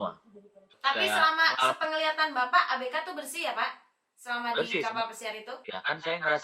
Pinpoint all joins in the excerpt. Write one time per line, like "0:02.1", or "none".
0:05.5